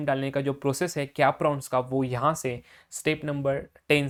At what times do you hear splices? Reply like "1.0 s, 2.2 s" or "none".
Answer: none